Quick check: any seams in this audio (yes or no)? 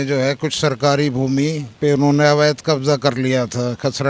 yes